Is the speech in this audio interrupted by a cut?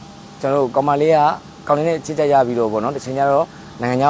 no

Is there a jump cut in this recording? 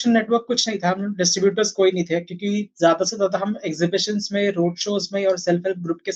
no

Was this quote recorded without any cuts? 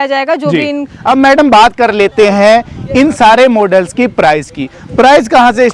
no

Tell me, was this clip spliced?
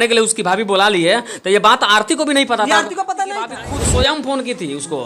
yes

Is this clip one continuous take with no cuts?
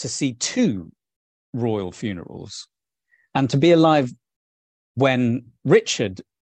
yes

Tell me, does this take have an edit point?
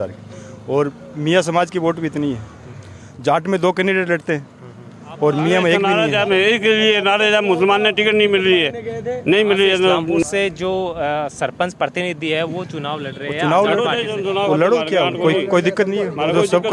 yes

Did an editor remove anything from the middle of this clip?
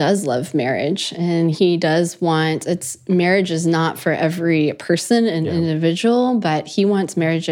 no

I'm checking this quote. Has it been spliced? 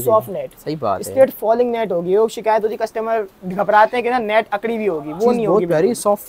no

